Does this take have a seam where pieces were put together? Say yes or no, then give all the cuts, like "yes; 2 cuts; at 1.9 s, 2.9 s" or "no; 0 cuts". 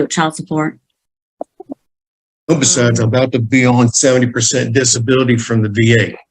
yes; 1 cut; at 2.5 s